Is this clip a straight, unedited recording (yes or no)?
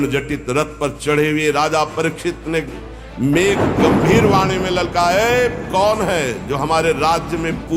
yes